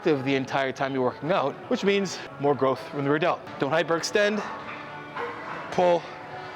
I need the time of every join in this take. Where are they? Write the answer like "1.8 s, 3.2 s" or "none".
3.5 s